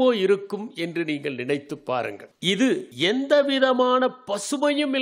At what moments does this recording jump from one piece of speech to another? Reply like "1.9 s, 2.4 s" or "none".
2.3 s, 2.9 s